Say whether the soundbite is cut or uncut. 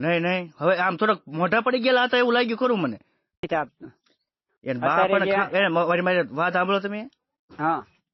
cut